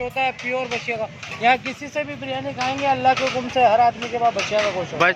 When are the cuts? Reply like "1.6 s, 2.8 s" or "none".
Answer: none